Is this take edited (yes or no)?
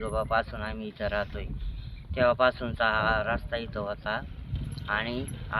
no